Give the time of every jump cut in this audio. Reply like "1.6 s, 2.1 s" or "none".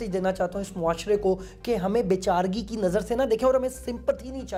none